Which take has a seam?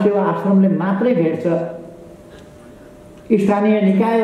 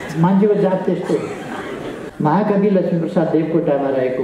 second; 1 cut; at 2.0 s

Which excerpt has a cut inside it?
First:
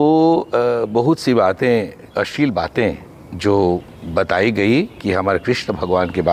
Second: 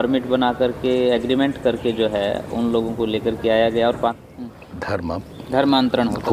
second; 1 cut; at 4.2 s

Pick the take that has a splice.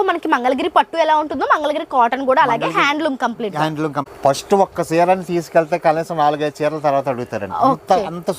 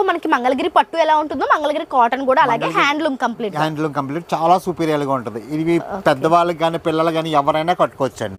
first; 1 cut; at 4.1 s

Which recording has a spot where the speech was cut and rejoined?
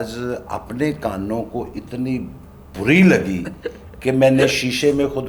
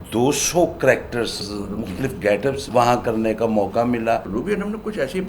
second; 3 cuts; at 1.4 s, 2.6 s, 4.3 s

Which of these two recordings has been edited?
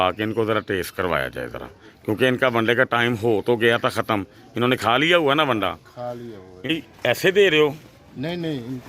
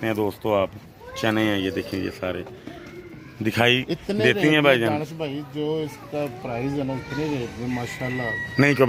first; 1 cut; at 6.7 s

